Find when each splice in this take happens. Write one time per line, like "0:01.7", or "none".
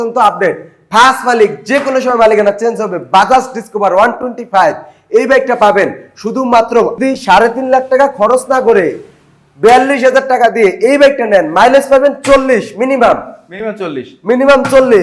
0:06.9